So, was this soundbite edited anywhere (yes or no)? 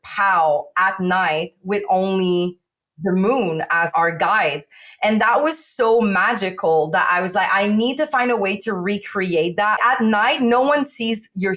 no